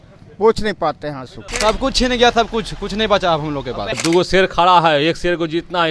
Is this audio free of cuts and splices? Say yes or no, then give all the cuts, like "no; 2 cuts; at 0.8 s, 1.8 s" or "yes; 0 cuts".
no; 2 cuts; at 1.5 s, 4.0 s